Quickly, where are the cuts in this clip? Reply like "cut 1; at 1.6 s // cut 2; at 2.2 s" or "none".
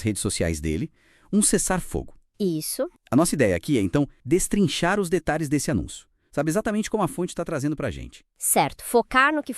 cut 1; at 4.2 s